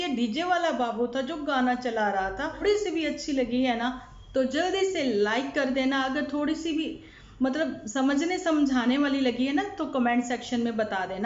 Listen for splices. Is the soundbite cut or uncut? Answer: cut